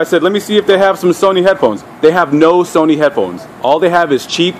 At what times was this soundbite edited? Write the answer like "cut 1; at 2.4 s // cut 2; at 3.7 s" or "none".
cut 1; at 2.7 s

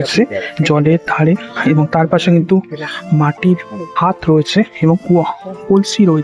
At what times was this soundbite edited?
none

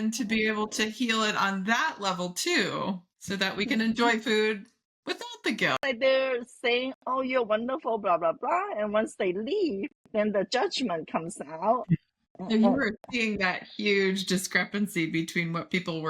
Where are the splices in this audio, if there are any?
cut 1; at 5.8 s

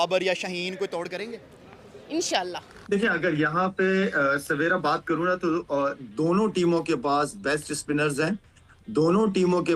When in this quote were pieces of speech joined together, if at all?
cut 1; at 2.7 s

